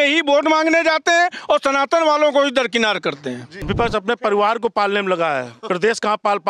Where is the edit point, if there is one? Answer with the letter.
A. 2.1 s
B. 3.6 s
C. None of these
B